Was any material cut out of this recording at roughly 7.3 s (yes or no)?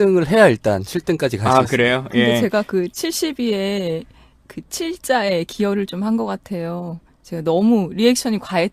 yes